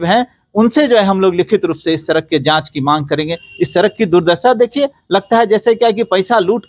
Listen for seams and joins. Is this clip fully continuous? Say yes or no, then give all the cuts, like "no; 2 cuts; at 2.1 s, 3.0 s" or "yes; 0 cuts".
yes; 0 cuts